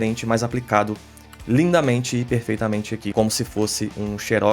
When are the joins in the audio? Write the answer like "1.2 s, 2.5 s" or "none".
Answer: 3.1 s